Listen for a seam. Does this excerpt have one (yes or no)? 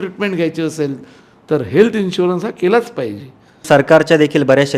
yes